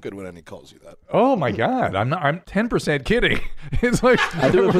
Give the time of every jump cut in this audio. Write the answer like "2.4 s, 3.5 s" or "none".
2.4 s

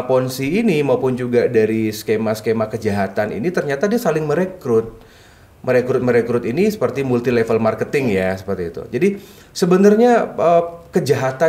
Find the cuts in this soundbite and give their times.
none

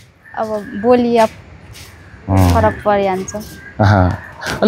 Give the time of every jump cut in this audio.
none

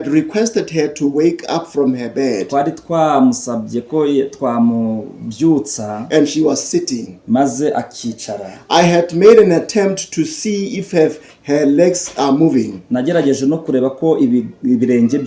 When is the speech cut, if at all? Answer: none

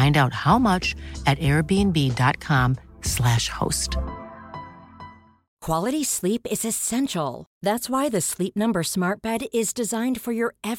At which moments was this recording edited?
5.5 s

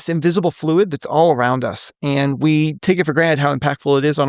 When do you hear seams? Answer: 2.8 s

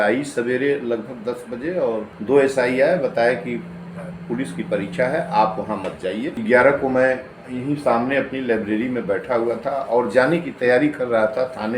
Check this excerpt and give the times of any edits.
2.1 s, 6.3 s

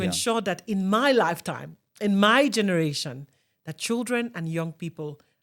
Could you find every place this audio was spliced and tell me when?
none

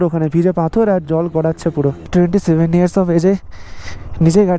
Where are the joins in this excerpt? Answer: 2.1 s

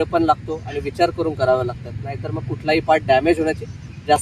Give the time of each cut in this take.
none

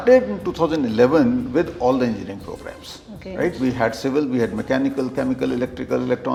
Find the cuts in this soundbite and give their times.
none

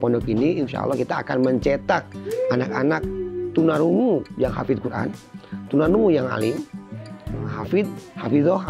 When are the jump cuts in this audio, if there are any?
none

